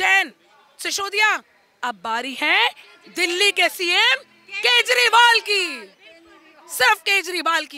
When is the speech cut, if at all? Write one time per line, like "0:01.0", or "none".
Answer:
none